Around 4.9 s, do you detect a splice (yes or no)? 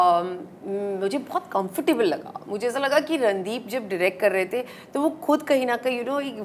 no